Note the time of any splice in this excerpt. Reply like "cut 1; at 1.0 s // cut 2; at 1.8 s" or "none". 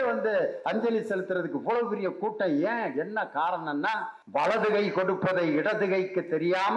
cut 1; at 4.1 s